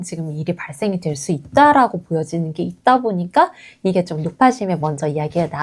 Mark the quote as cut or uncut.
uncut